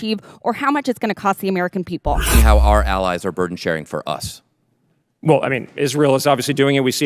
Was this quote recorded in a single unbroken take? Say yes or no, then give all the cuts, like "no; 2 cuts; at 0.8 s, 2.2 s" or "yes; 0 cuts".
no; 1 cut; at 2.3 s